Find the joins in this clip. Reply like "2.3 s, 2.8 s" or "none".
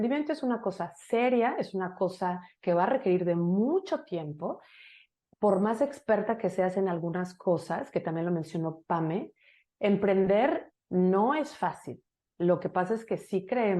none

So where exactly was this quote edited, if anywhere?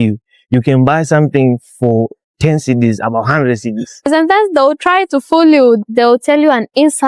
none

